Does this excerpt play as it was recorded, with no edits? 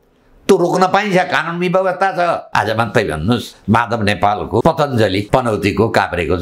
no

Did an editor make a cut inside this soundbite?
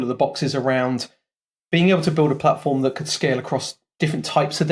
no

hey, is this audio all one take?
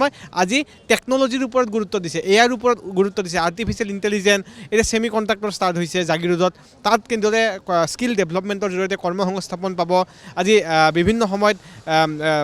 yes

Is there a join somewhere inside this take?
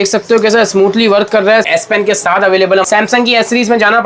yes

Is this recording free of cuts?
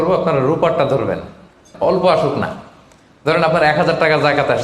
no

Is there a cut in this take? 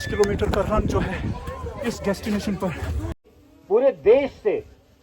yes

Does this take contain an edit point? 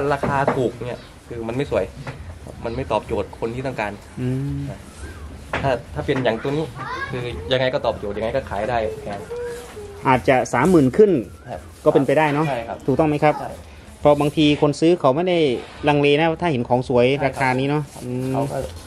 no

